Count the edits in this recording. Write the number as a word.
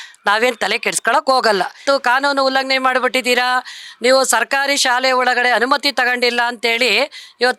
one